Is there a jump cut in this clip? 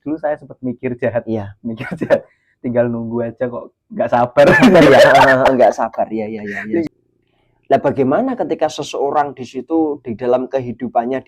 yes; 1 cut; at 6.8 s

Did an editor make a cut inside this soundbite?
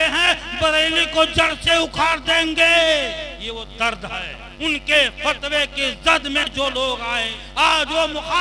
yes; 3 cuts; at 3.4 s, 4.4 s, 7.3 s

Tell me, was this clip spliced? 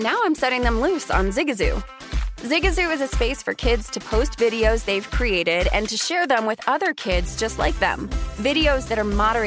no; 0 cuts

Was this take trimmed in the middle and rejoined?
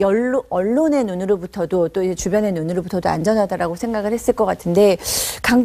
no; 0 cuts

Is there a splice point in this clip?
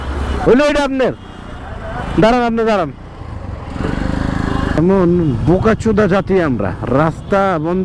yes; 1 cut; at 4.8 s

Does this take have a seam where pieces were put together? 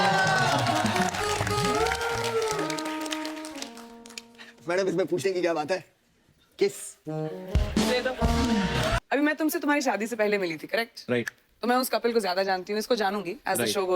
yes; 1 cut; at 9.0 s

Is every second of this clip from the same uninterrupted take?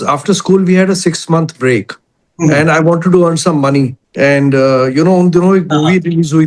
yes; 0 cuts

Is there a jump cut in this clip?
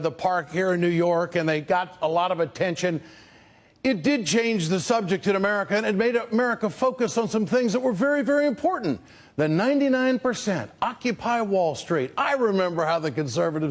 no; 0 cuts

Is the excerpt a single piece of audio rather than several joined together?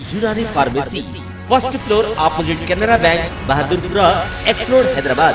yes; 0 cuts

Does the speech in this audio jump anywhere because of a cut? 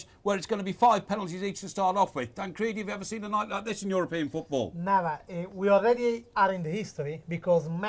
yes; 1 cut; at 6.7 s

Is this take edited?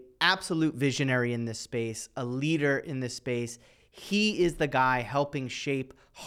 no; 0 cuts

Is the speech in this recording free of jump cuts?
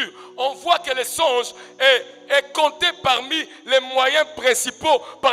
yes; 0 cuts

